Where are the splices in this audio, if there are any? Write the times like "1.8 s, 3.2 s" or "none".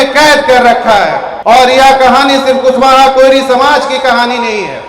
1.3 s